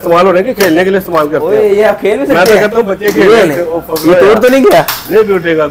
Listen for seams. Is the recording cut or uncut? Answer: uncut